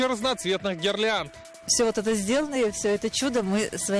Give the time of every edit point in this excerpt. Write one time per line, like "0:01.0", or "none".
none